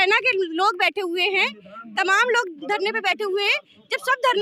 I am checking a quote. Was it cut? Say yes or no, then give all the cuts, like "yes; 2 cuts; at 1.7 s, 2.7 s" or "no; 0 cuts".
no; 0 cuts